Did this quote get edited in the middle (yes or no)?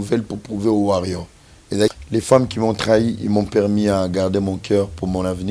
yes